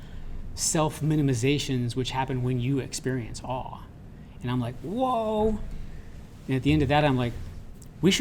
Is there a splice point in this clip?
no; 0 cuts

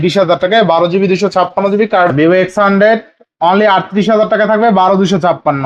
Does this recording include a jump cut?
yes; 1 cut; at 2.1 s

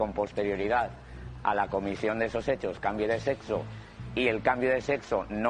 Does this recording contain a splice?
no; 0 cuts

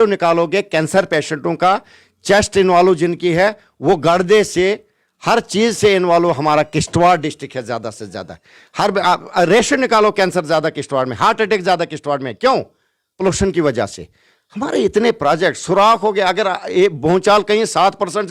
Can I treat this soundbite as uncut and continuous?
yes; 0 cuts

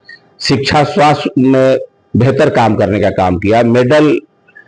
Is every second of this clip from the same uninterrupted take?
yes; 0 cuts

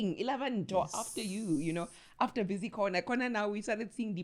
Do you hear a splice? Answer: no; 0 cuts

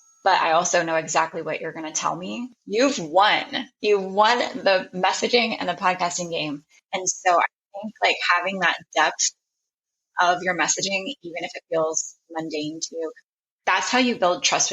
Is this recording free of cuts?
no; 3 cuts; at 2.5 s, 6.7 s, 13.2 s

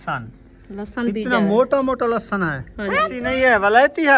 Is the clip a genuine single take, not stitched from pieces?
no; 1 cut; at 3.1 s

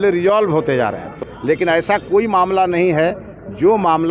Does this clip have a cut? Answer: yes; 1 cut; at 1.2 s

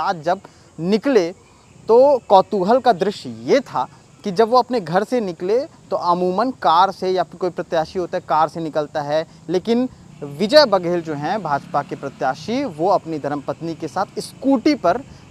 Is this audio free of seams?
yes; 0 cuts

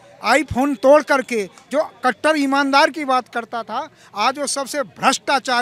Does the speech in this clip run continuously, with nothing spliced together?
yes; 0 cuts

